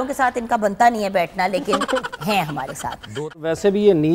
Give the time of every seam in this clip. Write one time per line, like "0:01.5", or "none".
0:03.1